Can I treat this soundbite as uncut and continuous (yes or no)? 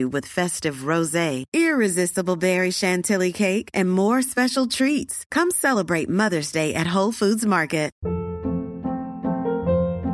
no